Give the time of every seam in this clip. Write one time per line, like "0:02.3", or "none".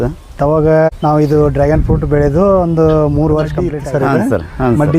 0:00.9
0:03.7